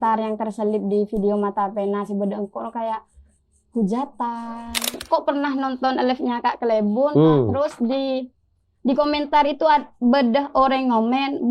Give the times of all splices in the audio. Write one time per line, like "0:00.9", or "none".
0:04.9